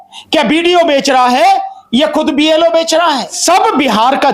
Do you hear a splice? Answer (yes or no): yes